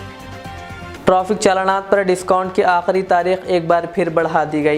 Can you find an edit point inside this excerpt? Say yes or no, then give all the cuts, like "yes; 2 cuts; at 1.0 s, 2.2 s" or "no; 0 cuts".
yes; 1 cut; at 0.9 s